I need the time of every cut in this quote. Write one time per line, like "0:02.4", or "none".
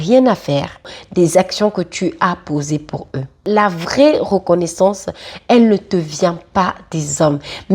0:01.0
0:03.4